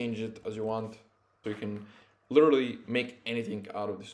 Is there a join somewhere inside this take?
yes; 1 cut; at 1.4 s

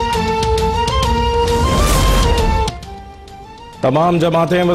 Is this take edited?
yes; 1 cut; at 1.4 s

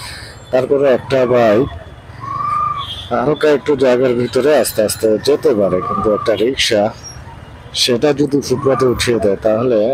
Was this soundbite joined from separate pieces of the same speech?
no; 0 cuts

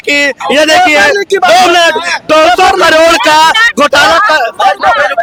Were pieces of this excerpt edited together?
no; 0 cuts

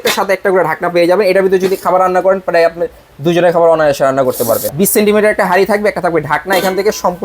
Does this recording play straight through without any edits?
no; 1 cut; at 4.7 s

